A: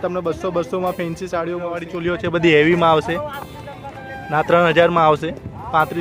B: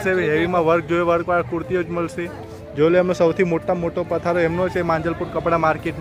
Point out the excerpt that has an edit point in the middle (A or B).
A